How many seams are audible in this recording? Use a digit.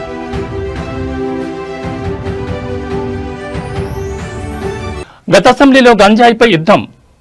1